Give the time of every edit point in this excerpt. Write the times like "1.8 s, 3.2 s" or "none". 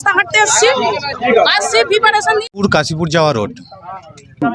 2.5 s

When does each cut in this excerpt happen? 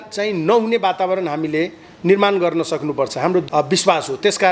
3.4 s

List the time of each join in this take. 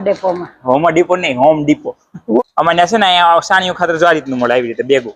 2.4 s

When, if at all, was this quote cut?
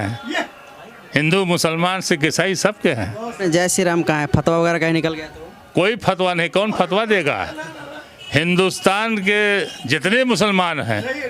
3.4 s

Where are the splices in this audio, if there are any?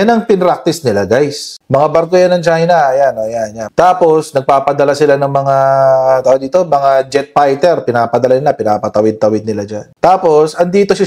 1.5 s, 3.5 s

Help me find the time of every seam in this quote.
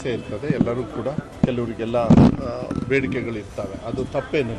1.3 s

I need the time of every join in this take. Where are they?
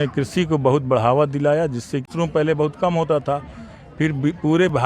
2.1 s

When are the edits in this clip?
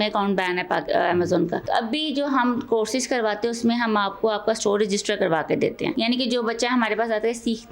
1.6 s, 5.9 s

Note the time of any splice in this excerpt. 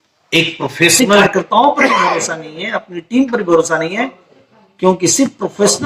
0.9 s

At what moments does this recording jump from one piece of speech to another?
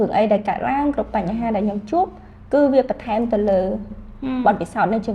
none

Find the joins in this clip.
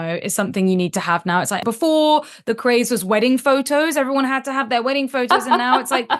1.6 s

